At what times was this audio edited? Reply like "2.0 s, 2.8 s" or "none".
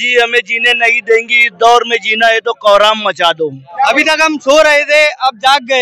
3.6 s